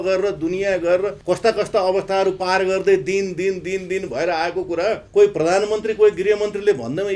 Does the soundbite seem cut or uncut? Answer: cut